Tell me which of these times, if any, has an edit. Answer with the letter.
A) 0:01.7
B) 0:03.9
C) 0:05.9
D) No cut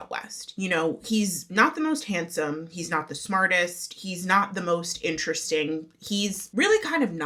D